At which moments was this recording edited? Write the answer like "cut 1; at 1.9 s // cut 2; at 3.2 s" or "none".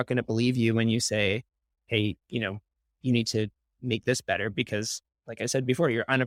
none